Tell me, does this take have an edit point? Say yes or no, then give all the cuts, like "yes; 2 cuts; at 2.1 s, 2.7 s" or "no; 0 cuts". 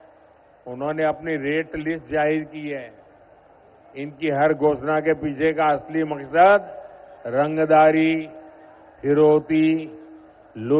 no; 0 cuts